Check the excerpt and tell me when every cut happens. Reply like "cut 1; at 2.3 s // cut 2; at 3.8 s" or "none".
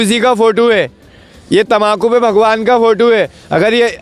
none